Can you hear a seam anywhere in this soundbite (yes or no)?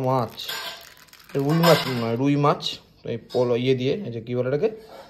no